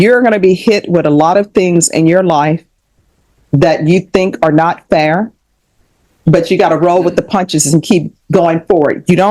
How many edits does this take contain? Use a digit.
0